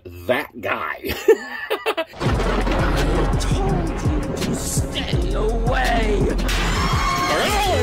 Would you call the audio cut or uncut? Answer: cut